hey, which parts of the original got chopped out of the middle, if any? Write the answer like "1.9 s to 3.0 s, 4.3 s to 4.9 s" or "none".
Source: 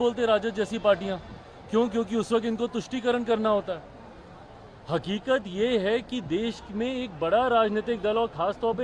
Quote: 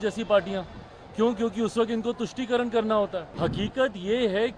3.8 s to 4.8 s